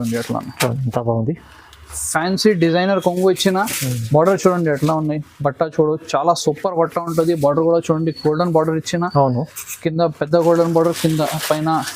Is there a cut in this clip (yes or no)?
no